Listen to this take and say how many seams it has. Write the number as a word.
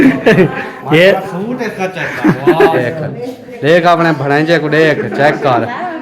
one